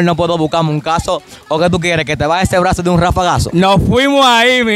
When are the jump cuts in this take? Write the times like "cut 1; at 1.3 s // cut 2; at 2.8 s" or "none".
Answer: none